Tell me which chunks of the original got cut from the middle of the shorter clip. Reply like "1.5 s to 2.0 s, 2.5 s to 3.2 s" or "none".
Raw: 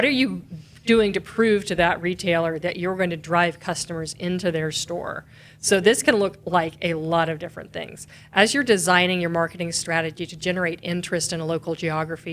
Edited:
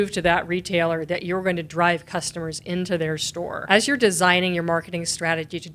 5.1 s to 8.2 s

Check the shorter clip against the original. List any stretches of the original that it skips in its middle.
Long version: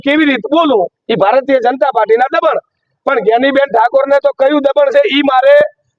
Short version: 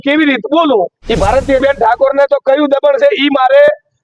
1.6 s to 3.5 s

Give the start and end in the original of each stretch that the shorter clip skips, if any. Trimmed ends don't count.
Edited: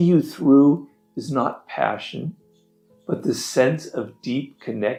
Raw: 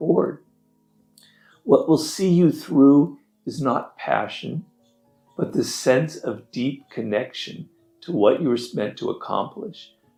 none

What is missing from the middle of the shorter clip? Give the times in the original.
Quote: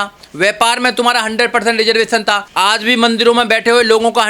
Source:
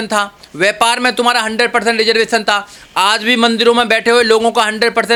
2.7 s to 2.9 s

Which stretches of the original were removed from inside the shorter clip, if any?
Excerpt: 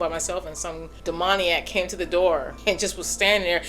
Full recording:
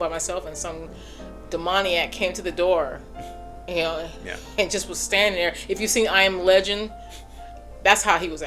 0.9 s to 1.3 s, 3.0 s to 4.4 s

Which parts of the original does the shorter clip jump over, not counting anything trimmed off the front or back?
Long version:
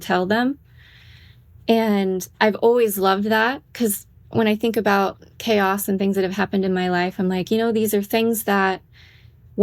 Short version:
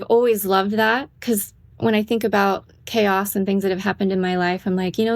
none

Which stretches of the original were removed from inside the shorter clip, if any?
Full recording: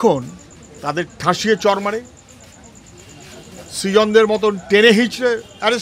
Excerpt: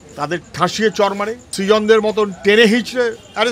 2.1 s to 3.7 s

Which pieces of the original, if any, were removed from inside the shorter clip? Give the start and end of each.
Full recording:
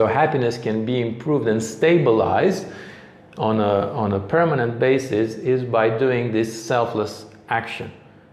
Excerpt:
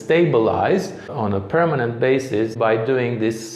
2.8 s to 3.9 s, 5.3 s to 5.7 s

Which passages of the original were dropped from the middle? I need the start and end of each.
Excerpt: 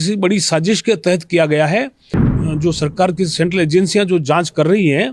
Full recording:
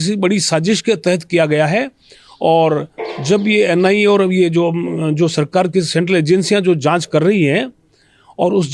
2.3 s to 4.9 s

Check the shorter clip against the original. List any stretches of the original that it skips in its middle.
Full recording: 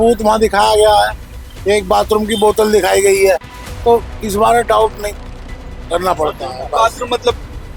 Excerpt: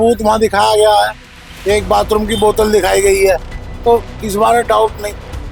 none

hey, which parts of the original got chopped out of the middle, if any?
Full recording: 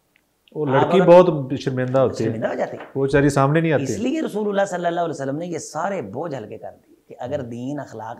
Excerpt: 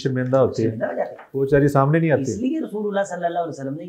none

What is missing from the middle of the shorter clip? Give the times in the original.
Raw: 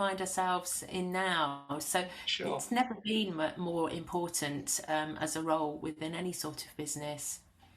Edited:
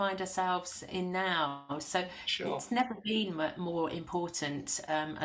none

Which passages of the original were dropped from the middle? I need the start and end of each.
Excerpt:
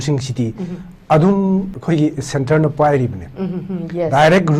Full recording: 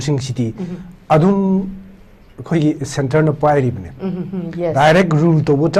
1.7 s to 2.4 s

